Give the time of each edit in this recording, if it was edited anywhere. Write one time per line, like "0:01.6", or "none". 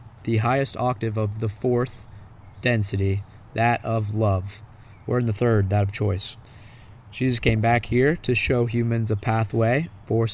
none